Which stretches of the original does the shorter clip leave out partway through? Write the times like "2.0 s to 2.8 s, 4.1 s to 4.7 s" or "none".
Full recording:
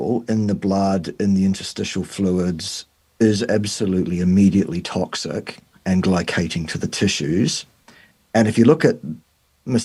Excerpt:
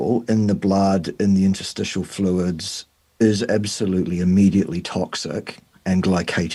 none